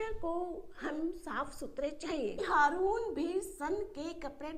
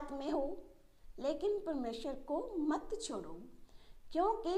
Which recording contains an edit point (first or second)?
first